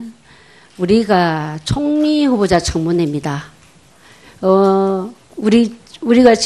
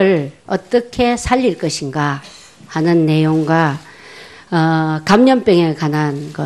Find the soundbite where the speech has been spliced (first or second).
second